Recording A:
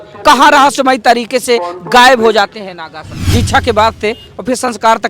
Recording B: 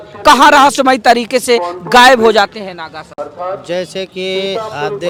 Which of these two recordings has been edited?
A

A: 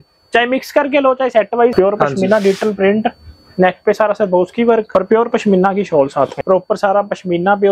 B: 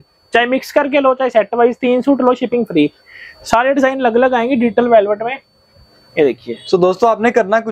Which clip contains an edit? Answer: A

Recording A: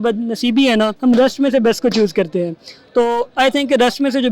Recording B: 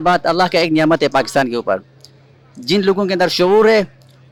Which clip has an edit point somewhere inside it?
A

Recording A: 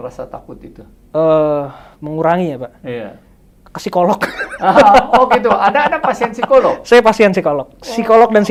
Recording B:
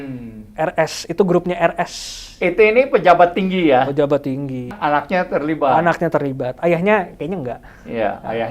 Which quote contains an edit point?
B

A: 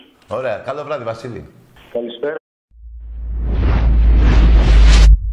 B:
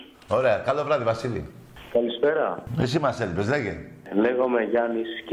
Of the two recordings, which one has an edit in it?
B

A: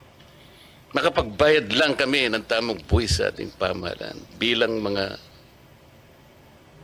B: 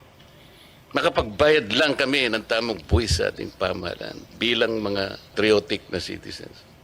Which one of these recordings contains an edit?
B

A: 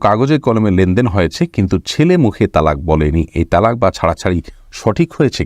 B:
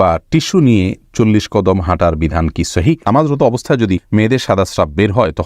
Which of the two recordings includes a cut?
B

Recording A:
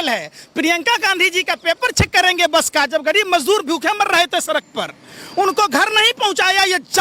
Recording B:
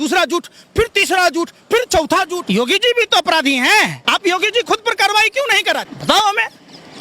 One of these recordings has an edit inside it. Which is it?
B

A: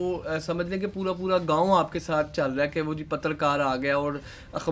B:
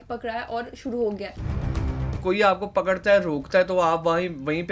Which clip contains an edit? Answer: B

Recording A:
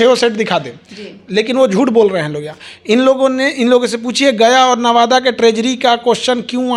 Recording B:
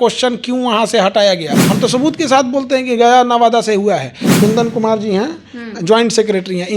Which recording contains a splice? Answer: B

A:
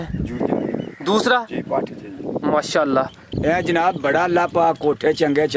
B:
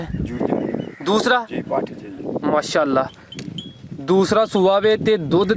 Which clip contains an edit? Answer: A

